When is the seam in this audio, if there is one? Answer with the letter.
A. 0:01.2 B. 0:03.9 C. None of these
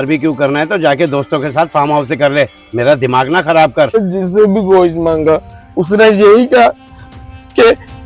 B